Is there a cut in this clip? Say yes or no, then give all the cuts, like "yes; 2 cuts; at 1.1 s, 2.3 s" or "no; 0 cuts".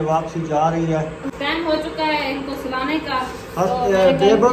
yes; 1 cut; at 1.3 s